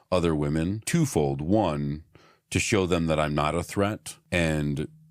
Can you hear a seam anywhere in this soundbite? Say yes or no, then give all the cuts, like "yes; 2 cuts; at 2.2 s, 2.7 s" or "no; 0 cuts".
yes; 2 cuts; at 0.8 s, 4.1 s